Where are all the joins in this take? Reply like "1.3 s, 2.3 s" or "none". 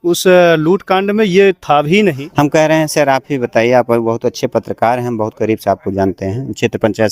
2.2 s